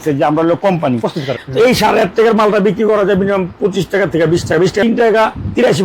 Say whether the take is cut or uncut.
cut